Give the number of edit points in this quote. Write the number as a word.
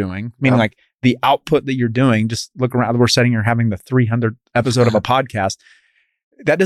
one